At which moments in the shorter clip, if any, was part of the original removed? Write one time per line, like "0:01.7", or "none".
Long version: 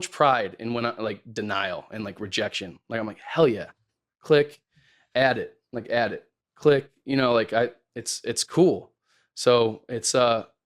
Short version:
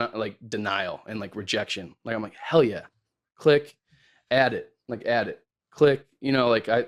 none